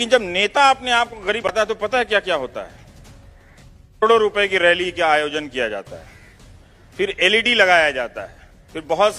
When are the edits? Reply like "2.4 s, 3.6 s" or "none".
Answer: 1.5 s